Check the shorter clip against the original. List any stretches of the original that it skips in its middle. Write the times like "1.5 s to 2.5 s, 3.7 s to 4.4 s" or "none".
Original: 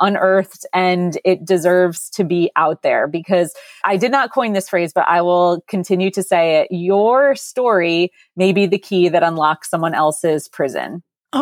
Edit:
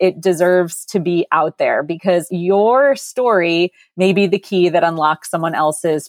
3.6 s to 6.7 s